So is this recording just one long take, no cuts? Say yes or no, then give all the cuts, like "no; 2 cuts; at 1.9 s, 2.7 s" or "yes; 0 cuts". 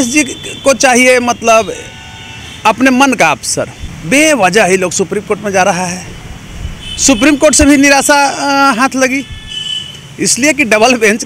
no; 1 cut; at 3.8 s